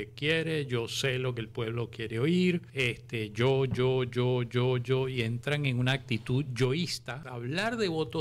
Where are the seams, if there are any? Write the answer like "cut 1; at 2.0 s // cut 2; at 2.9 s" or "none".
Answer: cut 1; at 2.7 s // cut 2; at 7.3 s